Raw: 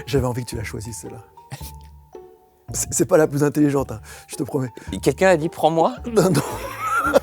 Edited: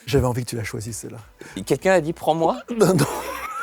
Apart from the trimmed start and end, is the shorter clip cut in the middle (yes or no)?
yes